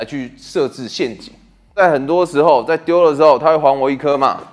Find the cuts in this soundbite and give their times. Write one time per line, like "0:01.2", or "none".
none